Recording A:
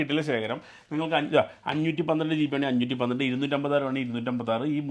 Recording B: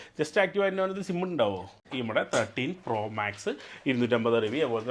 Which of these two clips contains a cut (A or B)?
B